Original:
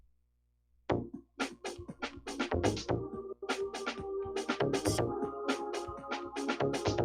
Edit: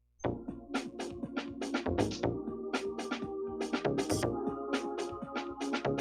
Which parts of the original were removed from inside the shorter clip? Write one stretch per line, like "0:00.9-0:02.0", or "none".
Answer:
0:03.3-0:03.4